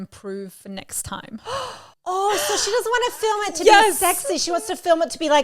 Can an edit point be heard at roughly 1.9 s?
yes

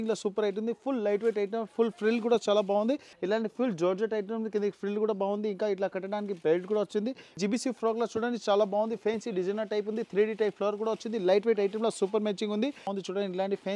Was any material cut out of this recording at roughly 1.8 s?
no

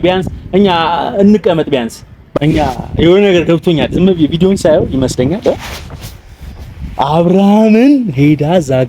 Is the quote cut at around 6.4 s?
no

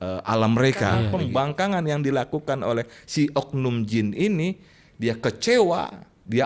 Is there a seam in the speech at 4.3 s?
no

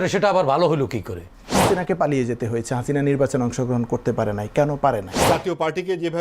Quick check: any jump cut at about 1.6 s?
yes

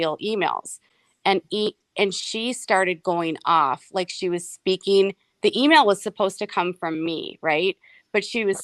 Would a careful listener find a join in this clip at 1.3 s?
no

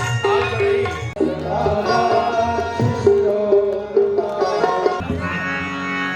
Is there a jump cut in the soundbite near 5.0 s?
yes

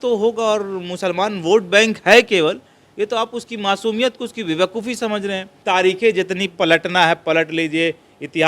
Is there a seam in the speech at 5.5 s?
yes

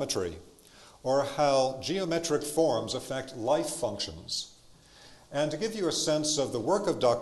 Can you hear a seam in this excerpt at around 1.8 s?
yes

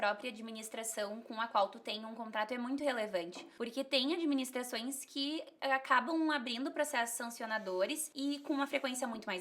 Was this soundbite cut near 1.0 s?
no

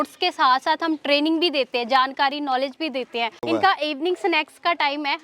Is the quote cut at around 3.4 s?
yes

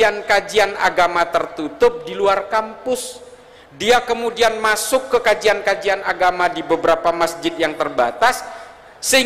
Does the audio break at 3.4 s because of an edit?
no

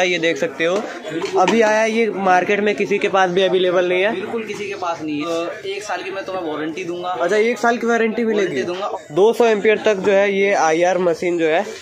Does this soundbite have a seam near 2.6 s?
no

